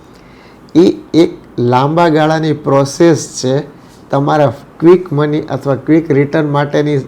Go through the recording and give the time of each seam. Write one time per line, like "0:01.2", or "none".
none